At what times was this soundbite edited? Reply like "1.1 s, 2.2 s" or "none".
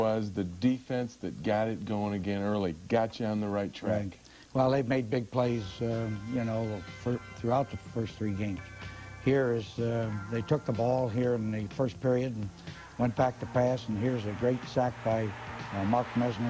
7.3 s